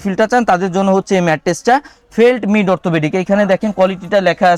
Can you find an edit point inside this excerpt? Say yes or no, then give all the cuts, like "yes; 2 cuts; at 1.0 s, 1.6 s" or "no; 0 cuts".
no; 0 cuts